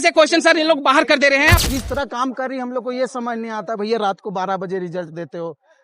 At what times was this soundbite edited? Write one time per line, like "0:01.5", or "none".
0:01.5